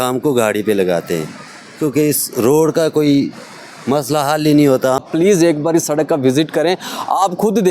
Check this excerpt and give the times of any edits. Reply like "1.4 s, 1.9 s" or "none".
5.1 s